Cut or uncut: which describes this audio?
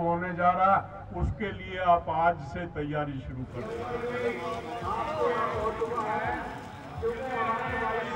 uncut